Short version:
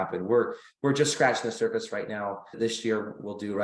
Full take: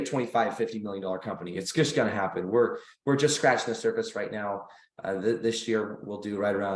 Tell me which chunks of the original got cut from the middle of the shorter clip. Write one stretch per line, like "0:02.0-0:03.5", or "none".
0:04.8-0:05.4